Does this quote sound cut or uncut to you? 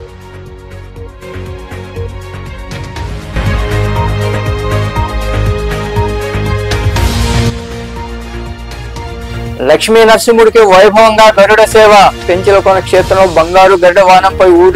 cut